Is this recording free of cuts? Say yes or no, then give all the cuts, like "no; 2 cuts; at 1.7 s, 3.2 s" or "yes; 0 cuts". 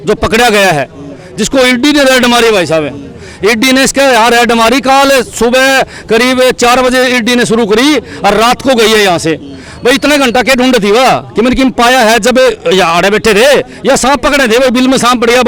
yes; 0 cuts